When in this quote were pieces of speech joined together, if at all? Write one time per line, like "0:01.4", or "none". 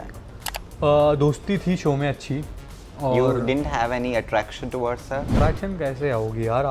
0:05.3